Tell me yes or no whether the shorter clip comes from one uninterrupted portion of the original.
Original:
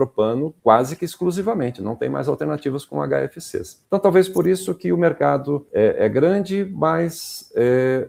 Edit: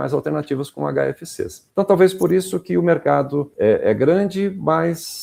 yes